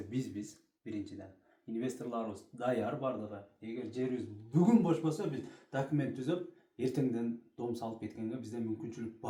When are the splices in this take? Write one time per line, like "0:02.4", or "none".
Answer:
none